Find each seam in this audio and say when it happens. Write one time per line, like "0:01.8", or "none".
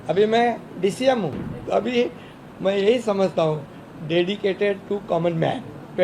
0:01.5